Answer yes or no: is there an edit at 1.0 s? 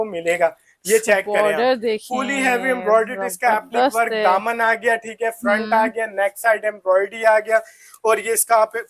no